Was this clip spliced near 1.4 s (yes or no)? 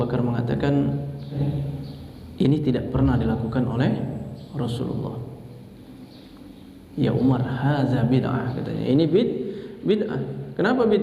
yes